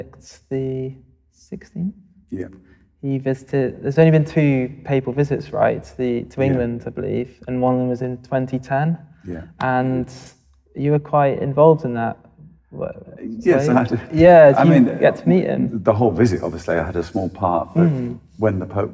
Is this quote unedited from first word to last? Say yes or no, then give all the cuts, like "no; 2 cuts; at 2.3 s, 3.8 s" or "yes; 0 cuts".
yes; 0 cuts